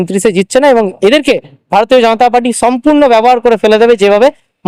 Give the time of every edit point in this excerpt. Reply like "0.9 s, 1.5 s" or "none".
none